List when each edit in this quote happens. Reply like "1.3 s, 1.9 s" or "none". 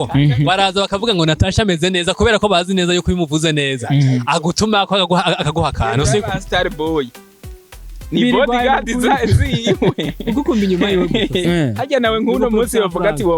none